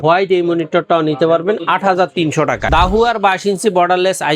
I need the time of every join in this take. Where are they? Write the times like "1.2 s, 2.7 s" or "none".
2.6 s